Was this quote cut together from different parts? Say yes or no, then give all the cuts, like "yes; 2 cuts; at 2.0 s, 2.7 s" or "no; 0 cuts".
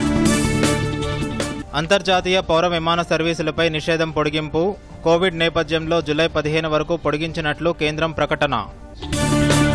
yes; 1 cut; at 1.1 s